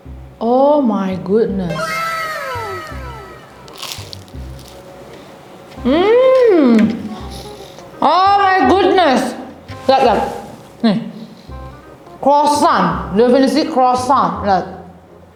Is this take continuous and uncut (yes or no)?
yes